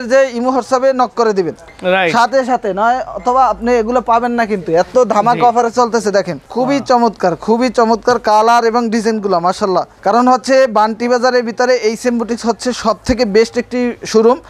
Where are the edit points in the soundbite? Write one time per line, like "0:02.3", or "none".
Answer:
none